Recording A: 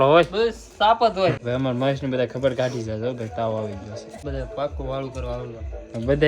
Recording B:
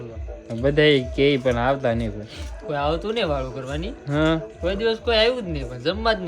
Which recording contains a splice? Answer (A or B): A